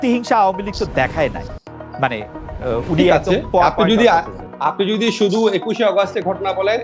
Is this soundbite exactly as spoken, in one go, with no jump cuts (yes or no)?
yes